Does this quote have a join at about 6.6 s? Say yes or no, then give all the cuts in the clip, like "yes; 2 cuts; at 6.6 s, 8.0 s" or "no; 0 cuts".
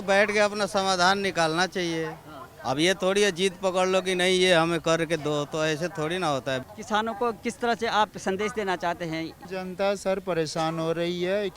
yes; 2 cuts; at 6.6 s, 9.4 s